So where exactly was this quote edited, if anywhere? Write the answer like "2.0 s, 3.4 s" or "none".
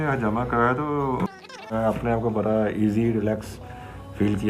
1.7 s